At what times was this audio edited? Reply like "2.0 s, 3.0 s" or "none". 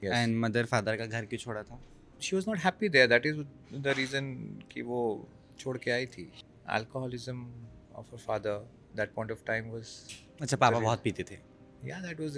2.2 s, 6.3 s